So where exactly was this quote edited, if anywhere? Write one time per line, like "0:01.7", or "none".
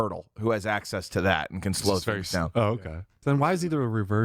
0:03.1